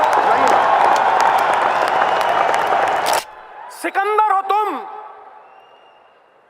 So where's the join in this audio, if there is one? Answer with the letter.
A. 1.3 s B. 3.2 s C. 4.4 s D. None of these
B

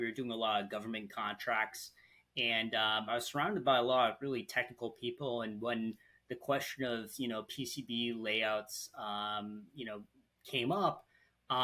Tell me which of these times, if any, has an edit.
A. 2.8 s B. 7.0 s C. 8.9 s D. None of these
D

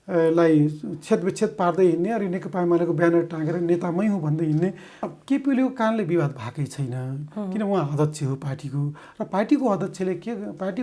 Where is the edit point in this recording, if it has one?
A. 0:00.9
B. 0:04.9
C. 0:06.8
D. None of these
B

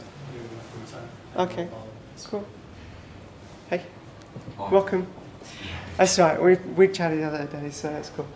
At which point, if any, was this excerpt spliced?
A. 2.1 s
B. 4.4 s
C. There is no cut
C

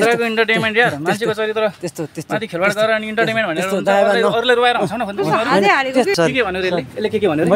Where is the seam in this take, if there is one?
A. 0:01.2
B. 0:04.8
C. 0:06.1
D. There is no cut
C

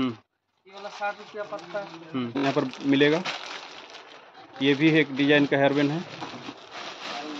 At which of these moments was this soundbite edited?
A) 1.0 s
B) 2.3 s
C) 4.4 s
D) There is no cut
B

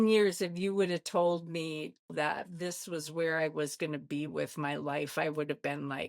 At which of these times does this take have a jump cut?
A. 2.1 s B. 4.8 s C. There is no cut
A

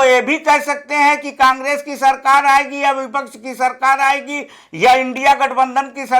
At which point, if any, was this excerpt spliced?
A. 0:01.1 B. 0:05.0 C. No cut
C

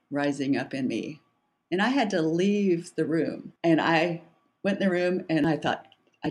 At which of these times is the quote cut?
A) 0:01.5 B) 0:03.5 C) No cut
B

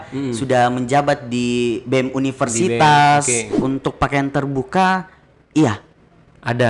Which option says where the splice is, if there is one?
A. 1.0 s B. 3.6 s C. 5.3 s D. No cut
B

